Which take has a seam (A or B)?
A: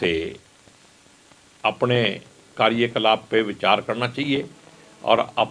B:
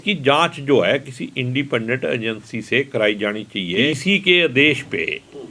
B